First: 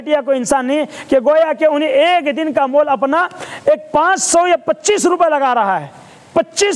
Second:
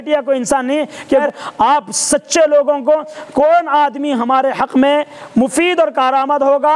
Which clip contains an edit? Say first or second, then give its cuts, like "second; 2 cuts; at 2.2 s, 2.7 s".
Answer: second; 1 cut; at 1.2 s